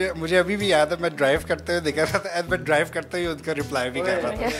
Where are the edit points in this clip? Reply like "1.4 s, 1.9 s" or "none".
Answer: none